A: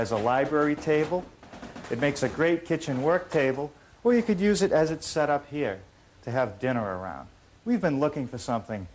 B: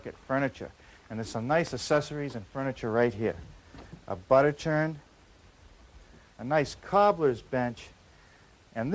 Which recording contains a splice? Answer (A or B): A